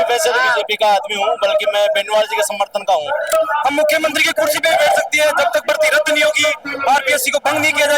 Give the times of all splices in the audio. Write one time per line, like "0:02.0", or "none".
0:03.3